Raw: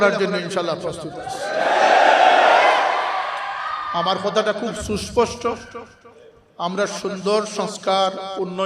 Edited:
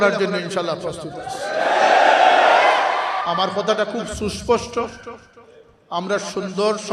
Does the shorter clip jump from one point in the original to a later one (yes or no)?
yes